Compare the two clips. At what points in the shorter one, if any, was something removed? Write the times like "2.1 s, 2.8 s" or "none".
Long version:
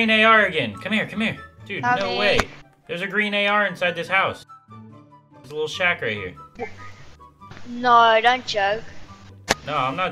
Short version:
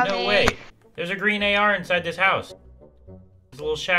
none